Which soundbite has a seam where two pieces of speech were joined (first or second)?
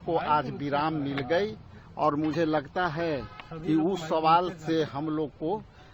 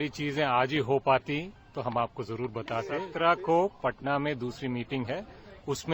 second